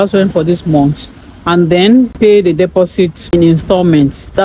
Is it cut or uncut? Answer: cut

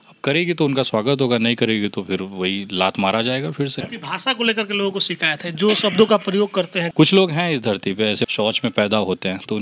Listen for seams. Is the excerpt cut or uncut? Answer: cut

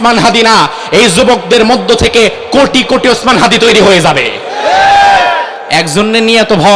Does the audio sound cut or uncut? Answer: uncut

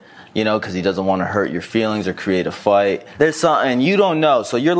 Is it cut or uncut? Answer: cut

